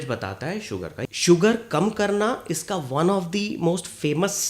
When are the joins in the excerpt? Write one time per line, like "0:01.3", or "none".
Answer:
0:01.0